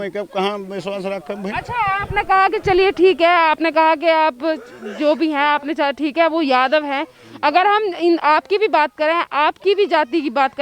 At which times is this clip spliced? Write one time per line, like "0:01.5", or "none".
none